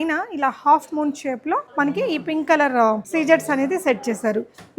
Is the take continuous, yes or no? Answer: no